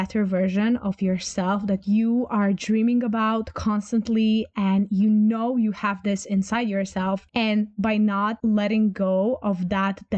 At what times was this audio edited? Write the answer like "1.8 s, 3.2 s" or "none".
7.3 s